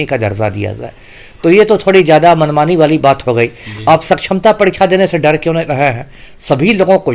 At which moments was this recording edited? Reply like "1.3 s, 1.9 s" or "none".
none